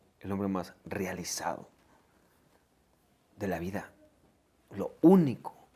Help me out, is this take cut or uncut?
uncut